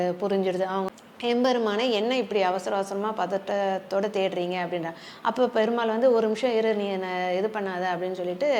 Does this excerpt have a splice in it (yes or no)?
yes